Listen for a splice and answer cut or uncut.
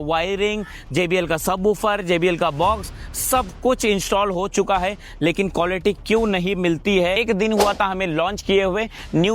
cut